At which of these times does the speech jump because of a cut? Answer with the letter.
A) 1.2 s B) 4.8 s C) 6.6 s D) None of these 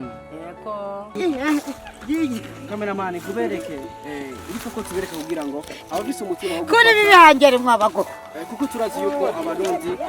A